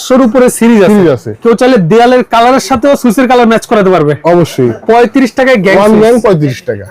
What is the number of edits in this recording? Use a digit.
2